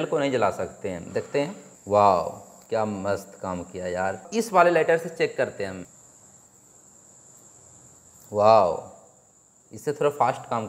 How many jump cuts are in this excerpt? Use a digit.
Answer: 2